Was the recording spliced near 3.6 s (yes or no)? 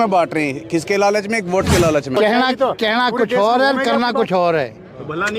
no